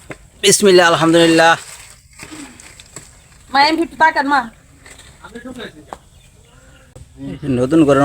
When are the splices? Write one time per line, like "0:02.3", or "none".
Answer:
0:07.0